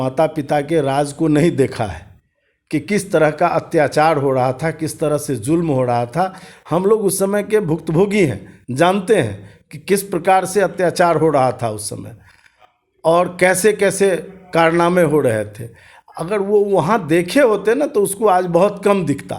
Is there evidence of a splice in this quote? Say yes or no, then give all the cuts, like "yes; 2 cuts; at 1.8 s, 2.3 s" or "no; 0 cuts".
no; 0 cuts